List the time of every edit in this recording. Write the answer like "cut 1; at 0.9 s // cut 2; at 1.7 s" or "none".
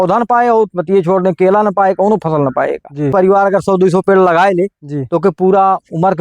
cut 1; at 3.1 s